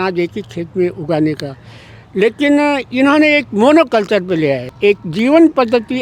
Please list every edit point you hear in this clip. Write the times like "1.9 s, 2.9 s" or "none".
4.7 s